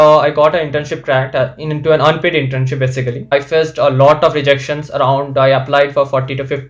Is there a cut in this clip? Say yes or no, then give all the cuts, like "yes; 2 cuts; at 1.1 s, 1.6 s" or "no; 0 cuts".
yes; 1 cut; at 3.3 s